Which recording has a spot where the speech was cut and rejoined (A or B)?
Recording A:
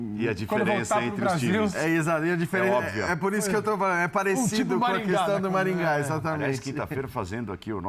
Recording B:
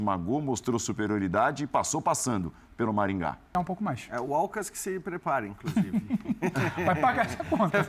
B